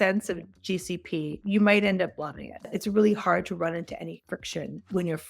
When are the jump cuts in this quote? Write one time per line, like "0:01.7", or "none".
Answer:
0:01.4
0:02.7